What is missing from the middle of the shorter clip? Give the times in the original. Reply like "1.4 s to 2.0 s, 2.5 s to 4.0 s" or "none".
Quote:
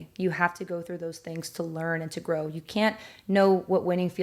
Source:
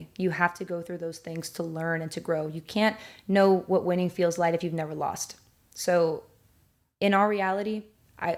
none